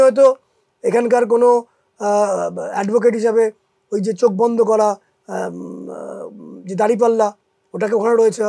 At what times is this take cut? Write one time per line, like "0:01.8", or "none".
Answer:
none